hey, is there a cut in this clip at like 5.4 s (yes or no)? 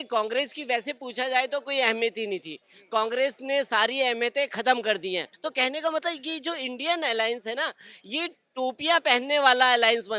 yes